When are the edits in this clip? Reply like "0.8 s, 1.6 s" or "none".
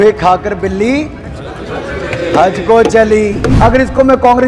3.4 s